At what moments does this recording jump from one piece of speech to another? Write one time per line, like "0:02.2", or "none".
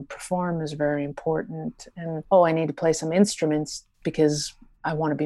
0:02.2